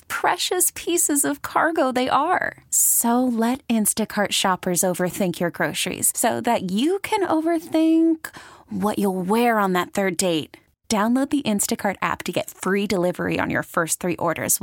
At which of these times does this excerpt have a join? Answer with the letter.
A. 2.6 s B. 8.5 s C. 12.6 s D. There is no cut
D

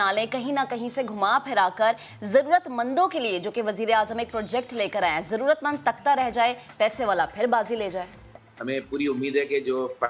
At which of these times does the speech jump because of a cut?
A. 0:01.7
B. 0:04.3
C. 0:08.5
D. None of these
C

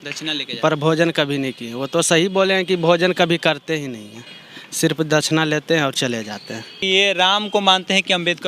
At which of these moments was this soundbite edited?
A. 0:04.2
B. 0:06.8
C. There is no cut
B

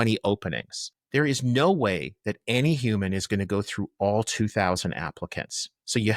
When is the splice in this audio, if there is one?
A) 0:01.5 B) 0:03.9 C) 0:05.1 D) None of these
D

